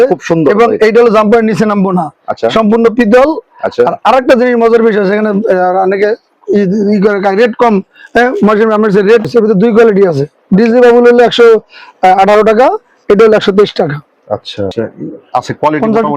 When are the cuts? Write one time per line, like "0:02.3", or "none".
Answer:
0:09.3
0:14.7